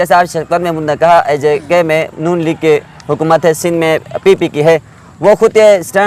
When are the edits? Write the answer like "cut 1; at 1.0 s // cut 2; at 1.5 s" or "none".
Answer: none